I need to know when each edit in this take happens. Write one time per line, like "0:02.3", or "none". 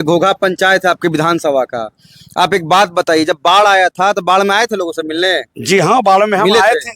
none